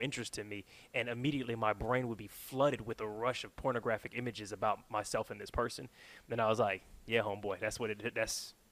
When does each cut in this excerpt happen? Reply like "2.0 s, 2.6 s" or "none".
none